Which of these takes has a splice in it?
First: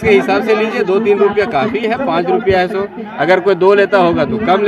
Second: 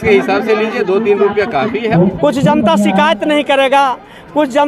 second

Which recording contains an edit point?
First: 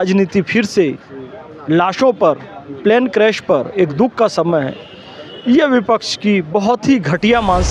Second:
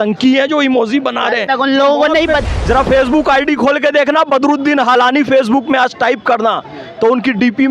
second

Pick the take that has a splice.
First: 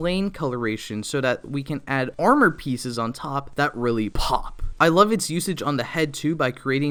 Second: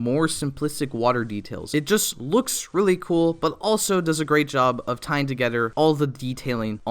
second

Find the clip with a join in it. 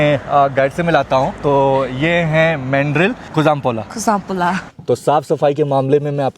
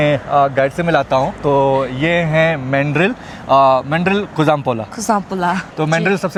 first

